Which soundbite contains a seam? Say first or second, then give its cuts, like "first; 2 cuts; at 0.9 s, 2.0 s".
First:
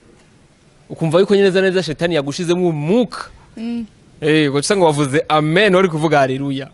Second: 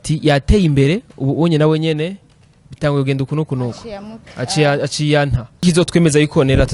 second; 1 cut; at 5.6 s